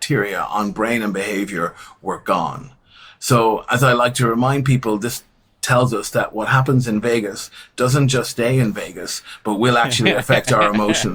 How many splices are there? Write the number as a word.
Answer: zero